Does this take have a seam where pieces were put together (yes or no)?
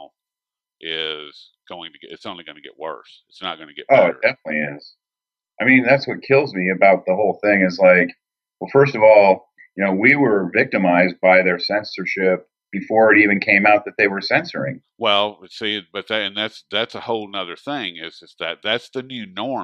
yes